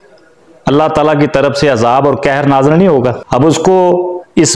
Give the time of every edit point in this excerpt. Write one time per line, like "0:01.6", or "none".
0:03.2